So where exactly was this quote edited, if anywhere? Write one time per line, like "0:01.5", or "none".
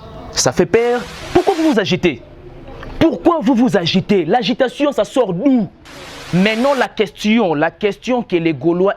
0:01.1
0:06.2